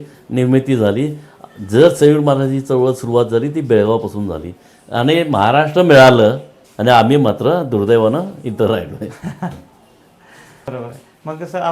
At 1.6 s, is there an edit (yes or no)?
no